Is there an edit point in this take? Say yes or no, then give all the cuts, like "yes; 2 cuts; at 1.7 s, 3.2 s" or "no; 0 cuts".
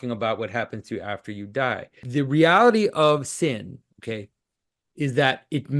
yes; 1 cut; at 2.0 s